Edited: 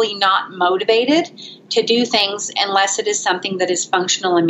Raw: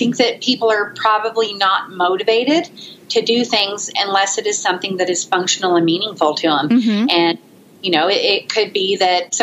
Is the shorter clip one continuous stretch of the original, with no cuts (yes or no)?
yes